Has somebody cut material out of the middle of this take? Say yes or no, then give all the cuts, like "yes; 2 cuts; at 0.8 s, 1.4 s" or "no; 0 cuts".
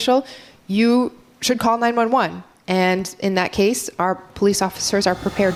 no; 0 cuts